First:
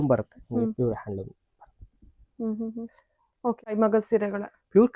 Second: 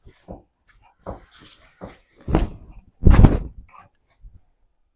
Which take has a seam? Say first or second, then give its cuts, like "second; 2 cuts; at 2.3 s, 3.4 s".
first; 1 cut; at 3.8 s